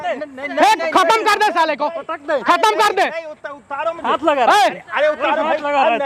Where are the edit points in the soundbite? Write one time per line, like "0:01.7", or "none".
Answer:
none